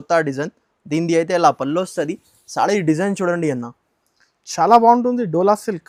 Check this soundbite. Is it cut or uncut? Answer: uncut